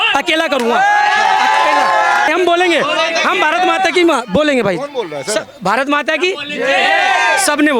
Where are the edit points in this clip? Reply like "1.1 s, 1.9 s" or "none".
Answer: 2.3 s